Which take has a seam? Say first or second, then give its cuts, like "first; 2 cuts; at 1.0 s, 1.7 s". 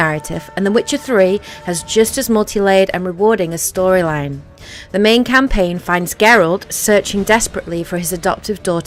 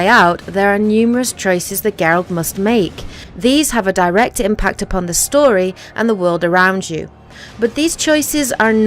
second; 1 cut; at 1.9 s